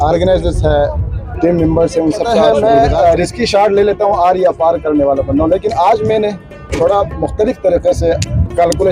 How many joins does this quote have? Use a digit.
1